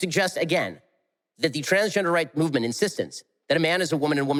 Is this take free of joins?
yes; 0 cuts

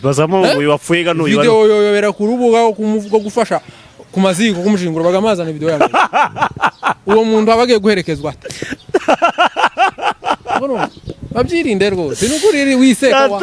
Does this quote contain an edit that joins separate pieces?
no; 0 cuts

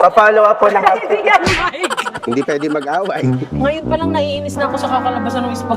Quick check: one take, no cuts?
no; 1 cut; at 2.1 s

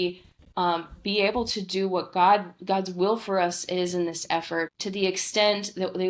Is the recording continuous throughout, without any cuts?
yes; 0 cuts

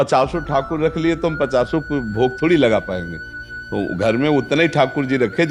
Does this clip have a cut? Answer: no; 0 cuts

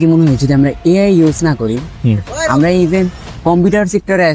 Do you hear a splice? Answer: yes; 1 cut; at 3.2 s

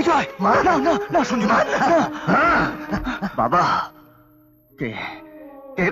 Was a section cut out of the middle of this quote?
no; 0 cuts

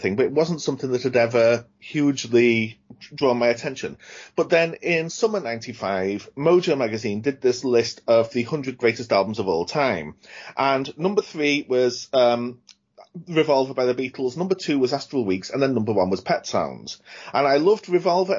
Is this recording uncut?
yes; 0 cuts

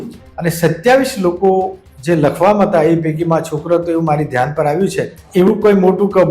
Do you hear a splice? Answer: yes; 1 cut; at 5.2 s

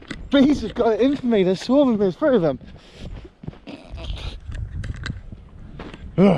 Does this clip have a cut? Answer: no; 0 cuts

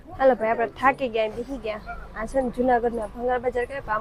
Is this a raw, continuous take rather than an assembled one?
yes; 0 cuts

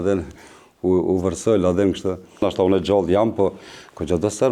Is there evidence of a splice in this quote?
yes; 1 cut; at 2.4 s

